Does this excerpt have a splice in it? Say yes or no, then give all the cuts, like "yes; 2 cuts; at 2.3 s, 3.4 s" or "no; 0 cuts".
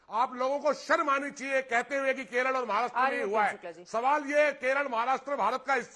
no; 0 cuts